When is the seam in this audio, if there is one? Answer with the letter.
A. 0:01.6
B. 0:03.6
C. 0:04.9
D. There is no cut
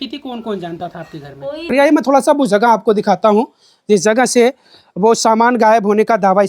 A